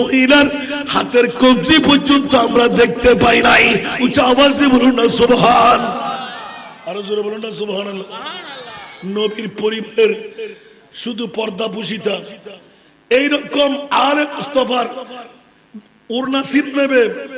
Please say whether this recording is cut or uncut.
uncut